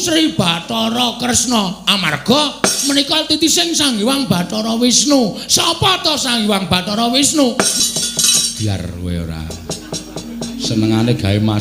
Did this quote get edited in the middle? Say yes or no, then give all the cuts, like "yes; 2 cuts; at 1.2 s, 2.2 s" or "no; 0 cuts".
yes; 1 cut; at 7.7 s